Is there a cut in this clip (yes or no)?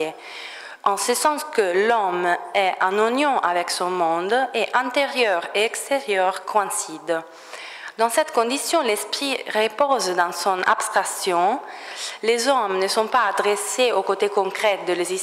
no